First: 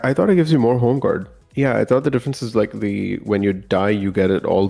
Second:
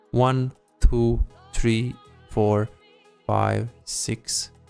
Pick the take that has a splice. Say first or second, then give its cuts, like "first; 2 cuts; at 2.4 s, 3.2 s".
first; 1 cut; at 1.4 s